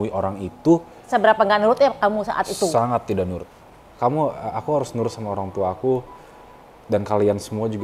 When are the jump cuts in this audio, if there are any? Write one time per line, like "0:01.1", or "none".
0:01.1
0:03.9

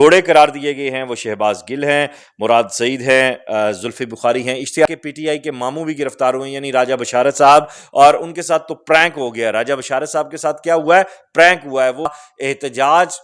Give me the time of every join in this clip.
0:04.9
0:12.1

